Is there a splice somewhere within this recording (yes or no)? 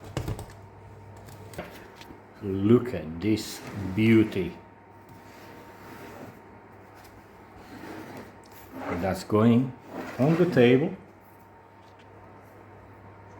yes